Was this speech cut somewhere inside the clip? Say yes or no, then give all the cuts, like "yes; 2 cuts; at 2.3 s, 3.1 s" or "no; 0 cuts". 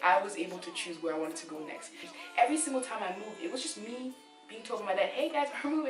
yes; 1 cut; at 2.1 s